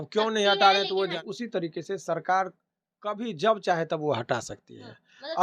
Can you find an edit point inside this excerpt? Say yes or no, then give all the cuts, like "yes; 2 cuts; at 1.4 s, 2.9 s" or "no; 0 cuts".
yes; 1 cut; at 1.2 s